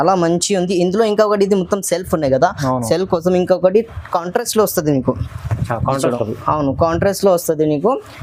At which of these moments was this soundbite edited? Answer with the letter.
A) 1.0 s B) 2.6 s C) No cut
C